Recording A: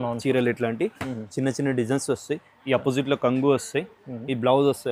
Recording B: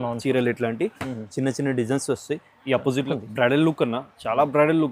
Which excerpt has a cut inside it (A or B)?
B